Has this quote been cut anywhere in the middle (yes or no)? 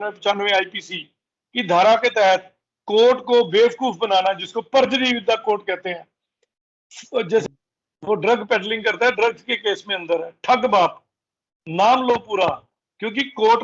yes